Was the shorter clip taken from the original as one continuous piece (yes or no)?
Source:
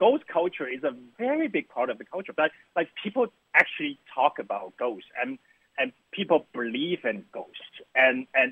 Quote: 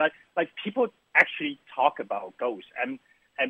yes